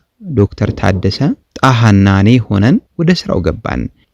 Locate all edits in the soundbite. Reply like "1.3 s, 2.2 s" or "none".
1.5 s, 2.9 s